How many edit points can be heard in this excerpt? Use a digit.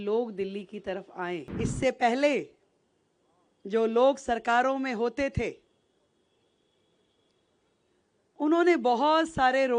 1